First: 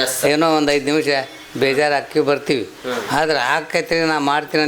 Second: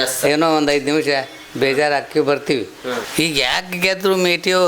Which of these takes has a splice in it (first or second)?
second